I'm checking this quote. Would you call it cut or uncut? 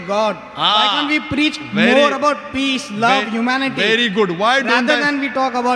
uncut